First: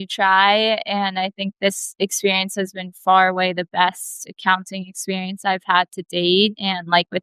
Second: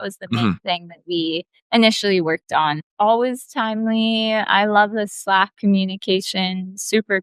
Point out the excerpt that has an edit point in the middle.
second; 2 cuts; at 1.5 s, 2.9 s

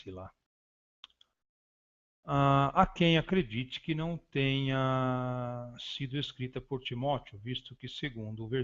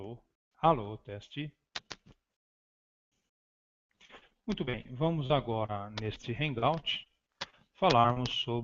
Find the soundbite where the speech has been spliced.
first; 1 cut; at 6.3 s

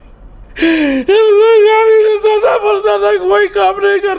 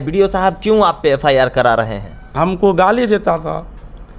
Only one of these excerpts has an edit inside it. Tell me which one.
second; 1 cut; at 2.3 s

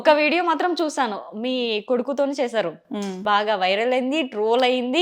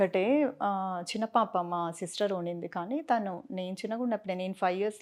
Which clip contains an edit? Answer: first; 1 cut; at 3.2 s

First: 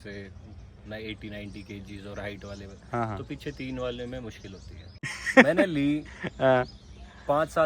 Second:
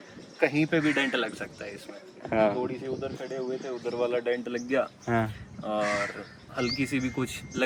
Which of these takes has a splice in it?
first; 1 cut; at 5.0 s

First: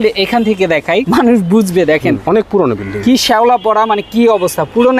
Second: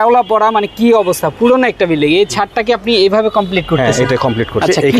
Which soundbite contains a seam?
first; 2 cuts; at 1.1 s, 2.2 s

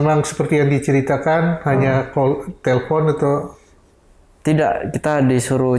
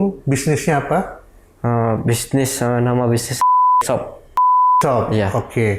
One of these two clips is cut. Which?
second; 1 cut; at 4.3 s

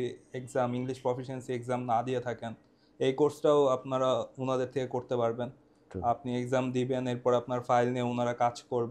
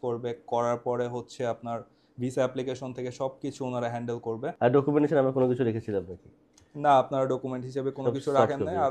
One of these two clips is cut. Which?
second; 1 cut; at 4.5 s

